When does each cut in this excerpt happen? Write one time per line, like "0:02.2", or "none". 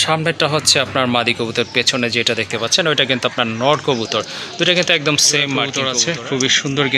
0:05.7